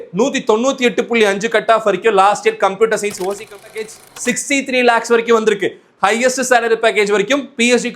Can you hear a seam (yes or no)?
yes